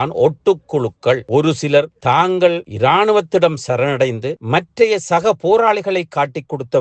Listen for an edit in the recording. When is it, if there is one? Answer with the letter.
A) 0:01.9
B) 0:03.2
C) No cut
C